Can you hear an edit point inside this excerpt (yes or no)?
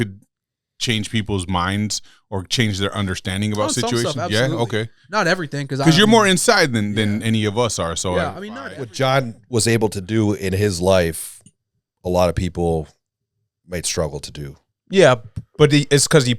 yes